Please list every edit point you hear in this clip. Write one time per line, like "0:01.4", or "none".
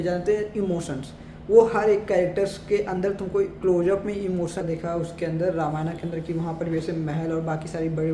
0:04.6